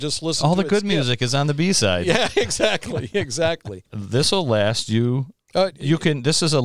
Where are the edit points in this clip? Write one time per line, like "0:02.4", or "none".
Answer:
0:04.0